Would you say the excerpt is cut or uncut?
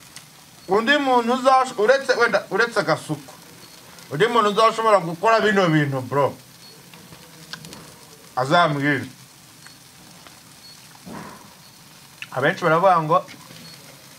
uncut